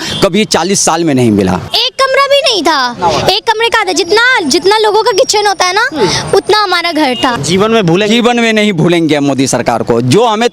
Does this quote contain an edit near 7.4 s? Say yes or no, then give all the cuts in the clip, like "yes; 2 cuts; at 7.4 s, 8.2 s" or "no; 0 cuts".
yes; 2 cuts; at 1.7 s, 7.4 s